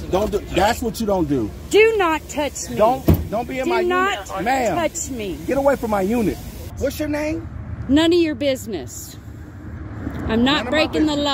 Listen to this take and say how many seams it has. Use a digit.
1